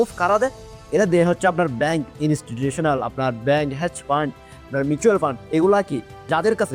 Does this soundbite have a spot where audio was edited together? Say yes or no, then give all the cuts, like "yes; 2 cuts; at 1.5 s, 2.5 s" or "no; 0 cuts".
no; 0 cuts